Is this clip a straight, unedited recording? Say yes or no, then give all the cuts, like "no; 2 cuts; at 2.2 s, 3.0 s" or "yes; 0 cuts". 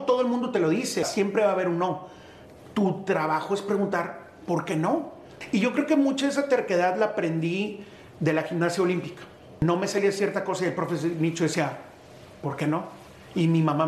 no; 3 cuts; at 1.1 s, 5.3 s, 9.6 s